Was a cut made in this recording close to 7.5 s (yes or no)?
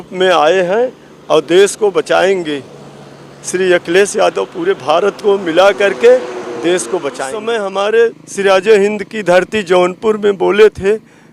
yes